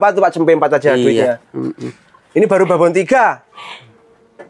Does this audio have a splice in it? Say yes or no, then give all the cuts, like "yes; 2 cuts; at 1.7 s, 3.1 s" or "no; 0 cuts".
no; 0 cuts